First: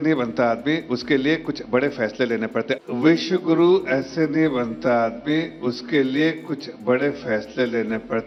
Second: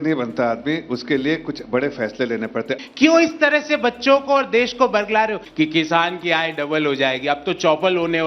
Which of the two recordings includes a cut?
second; 2 cuts; at 2.8 s, 5.4 s

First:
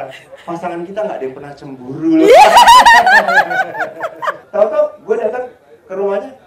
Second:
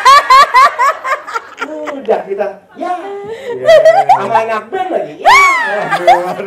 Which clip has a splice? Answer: first; 1 cut; at 4.4 s

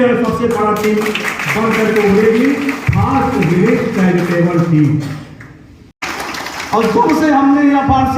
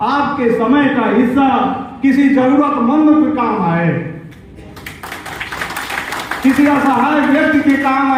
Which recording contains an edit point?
first; 1 cut; at 6.0 s

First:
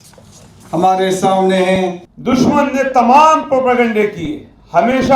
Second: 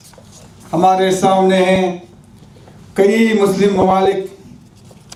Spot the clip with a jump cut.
first; 1 cut; at 2.1 s

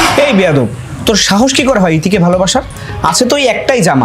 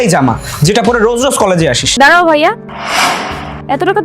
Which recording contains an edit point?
second; 1 cut; at 1.8 s

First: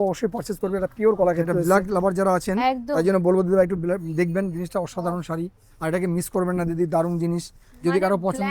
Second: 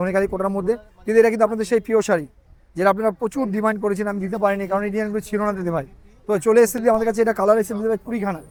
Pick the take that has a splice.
first; 1 cut; at 1.5 s

